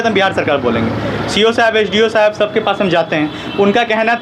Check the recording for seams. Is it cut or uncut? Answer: uncut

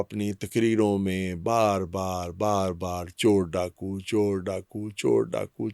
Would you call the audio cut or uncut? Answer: uncut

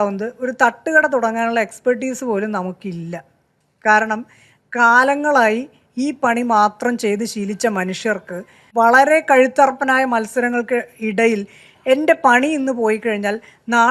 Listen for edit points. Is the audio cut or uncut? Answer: uncut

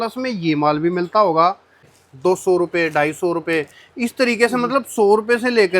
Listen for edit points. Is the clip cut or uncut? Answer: cut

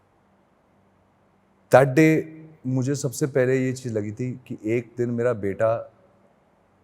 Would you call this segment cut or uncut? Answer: cut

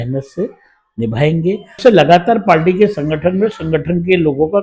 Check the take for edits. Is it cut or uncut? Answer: cut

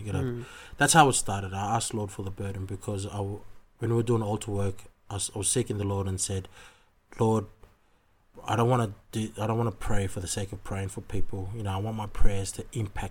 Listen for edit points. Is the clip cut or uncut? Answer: uncut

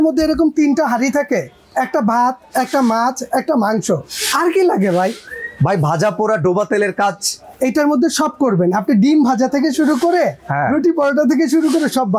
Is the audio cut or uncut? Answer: uncut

